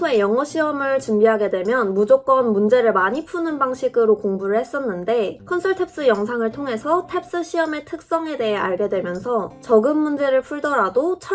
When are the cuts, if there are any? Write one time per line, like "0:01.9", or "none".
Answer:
none

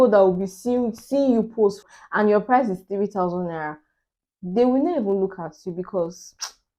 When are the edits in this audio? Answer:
0:01.9

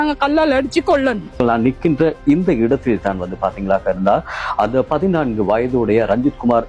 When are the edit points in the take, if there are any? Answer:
0:01.4

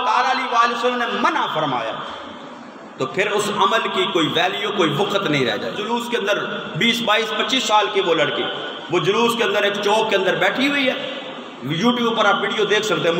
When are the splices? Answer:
0:05.8

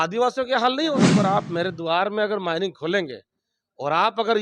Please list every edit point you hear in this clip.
0:00.9

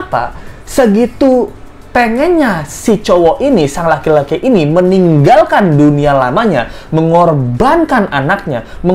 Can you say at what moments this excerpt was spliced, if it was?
none

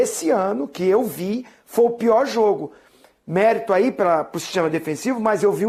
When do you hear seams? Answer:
none

